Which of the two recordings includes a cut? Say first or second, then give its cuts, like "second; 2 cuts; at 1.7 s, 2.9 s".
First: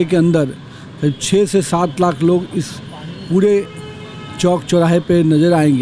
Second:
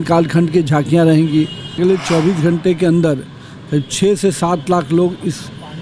second; 1 cut; at 1.8 s